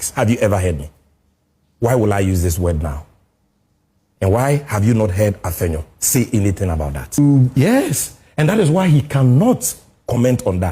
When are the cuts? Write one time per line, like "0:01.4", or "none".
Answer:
0:07.2